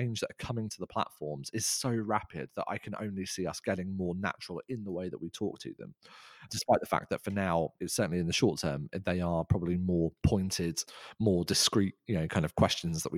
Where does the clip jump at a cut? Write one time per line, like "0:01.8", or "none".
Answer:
none